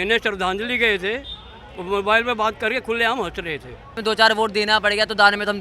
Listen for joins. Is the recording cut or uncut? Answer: cut